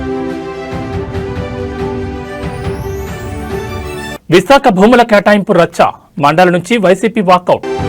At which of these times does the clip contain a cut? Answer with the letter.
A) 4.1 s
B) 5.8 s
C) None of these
A